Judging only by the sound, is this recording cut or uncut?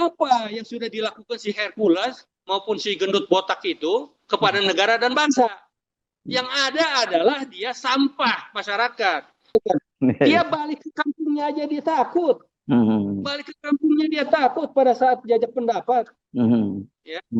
uncut